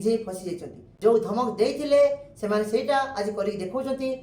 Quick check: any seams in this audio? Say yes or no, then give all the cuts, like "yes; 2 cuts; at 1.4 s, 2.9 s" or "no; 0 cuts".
yes; 1 cut; at 1.1 s